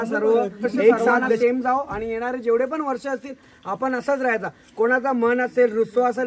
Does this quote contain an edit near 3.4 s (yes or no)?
no